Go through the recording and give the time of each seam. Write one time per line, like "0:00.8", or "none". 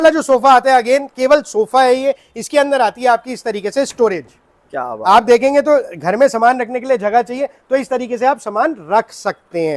none